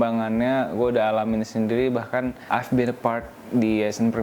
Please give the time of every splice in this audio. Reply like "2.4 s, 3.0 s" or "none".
2.4 s